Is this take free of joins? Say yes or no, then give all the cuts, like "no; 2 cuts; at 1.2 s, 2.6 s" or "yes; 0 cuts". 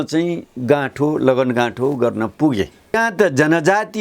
no; 1 cut; at 3.0 s